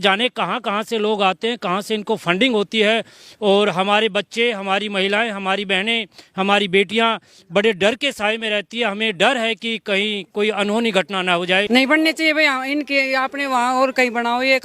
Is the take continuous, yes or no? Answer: no